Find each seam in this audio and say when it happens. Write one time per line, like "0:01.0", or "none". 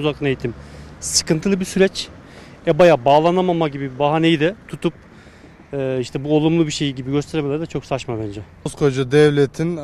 0:08.7